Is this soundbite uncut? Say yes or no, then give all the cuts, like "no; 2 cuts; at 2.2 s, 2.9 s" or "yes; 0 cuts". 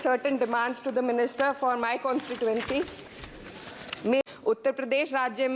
no; 1 cut; at 4.2 s